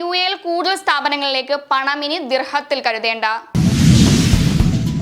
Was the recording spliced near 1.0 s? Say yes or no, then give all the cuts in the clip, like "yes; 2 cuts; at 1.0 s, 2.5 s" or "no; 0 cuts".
no; 1 cut; at 3.4 s